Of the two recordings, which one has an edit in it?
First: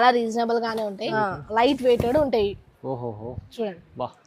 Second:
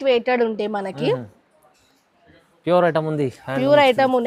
first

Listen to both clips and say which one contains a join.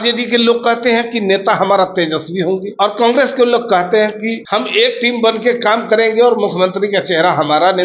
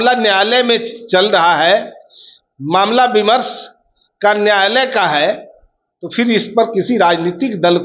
first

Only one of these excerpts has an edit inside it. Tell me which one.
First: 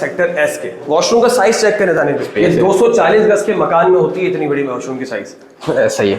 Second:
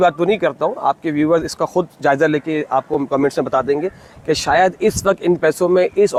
first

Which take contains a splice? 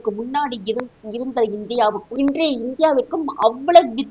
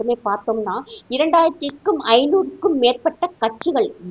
first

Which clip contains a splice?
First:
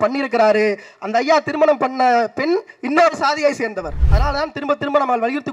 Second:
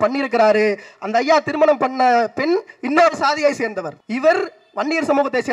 first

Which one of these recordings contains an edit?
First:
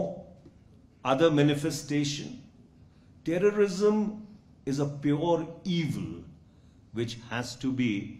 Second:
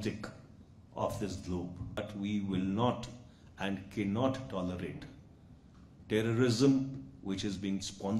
second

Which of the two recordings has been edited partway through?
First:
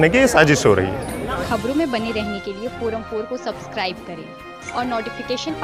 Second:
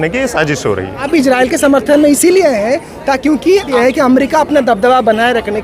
second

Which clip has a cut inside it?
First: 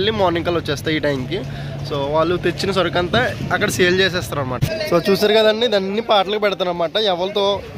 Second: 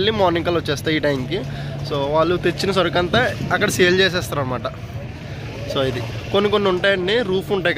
first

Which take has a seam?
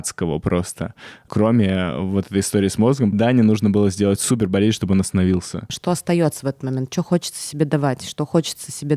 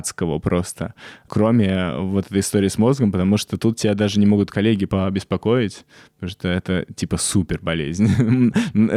first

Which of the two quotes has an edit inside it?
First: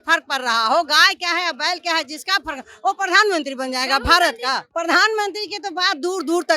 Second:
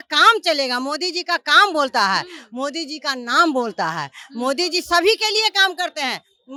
first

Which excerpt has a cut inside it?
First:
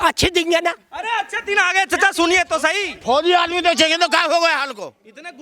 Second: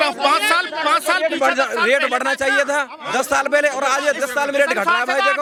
first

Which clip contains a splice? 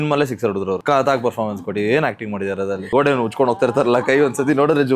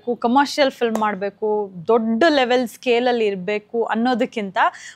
first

